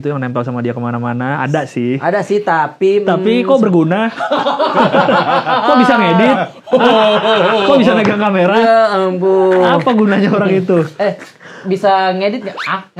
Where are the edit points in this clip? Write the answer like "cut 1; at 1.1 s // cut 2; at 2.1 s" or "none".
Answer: none